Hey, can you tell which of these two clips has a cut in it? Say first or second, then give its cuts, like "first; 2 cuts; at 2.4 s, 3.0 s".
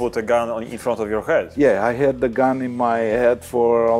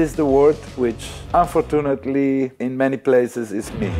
second; 2 cuts; at 1.1 s, 2.5 s